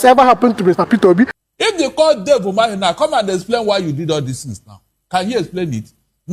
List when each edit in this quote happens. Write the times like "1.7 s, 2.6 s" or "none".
1.4 s